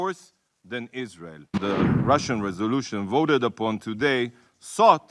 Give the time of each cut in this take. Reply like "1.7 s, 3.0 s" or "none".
1.5 s